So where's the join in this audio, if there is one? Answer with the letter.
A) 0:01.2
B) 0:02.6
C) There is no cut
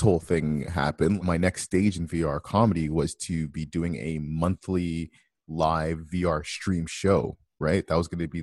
A